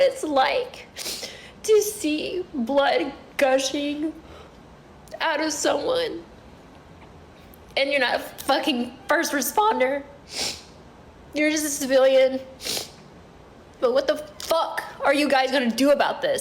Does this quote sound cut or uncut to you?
cut